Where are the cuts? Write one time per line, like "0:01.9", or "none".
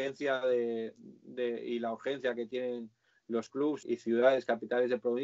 0:03.8